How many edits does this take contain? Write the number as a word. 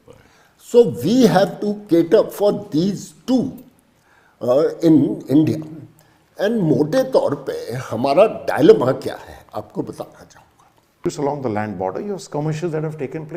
one